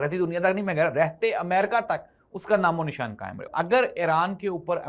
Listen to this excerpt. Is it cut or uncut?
cut